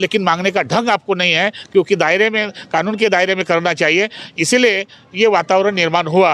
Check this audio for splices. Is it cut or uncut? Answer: uncut